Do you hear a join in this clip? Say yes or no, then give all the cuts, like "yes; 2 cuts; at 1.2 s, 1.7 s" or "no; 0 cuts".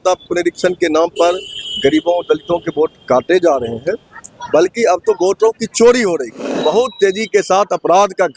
yes; 1 cut; at 6.5 s